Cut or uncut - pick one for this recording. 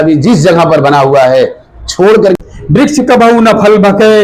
cut